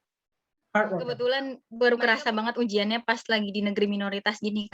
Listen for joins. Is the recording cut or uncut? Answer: cut